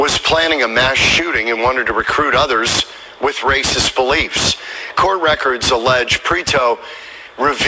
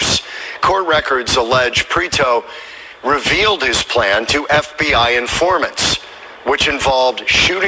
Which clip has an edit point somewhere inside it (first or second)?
second